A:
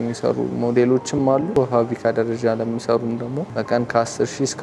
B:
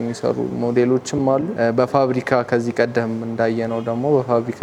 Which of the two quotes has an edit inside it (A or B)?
A